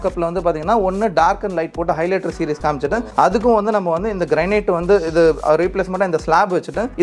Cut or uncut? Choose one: uncut